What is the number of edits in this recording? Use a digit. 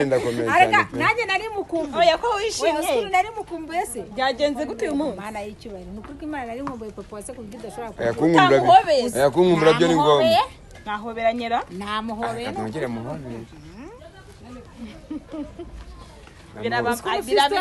0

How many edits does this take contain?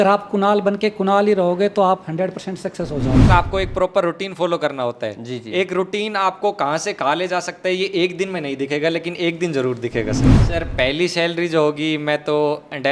2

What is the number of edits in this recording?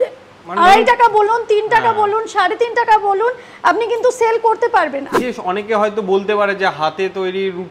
1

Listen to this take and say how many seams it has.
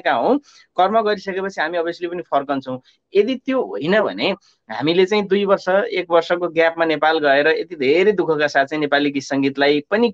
0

